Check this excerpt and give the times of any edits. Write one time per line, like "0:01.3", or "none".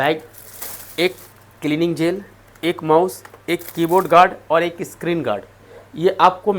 none